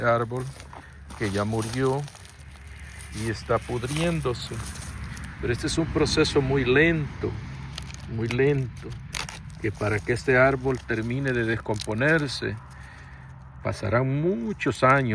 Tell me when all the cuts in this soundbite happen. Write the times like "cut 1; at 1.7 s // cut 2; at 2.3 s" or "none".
none